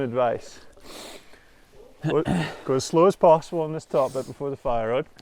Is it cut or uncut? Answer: uncut